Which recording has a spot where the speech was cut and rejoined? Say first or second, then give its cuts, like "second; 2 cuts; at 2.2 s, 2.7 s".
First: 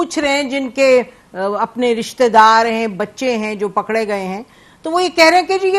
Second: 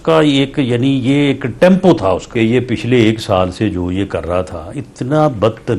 second; 1 cut; at 2.3 s